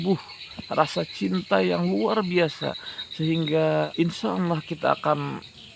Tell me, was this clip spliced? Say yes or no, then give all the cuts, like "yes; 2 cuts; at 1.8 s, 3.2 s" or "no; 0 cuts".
yes; 1 cut; at 3.9 s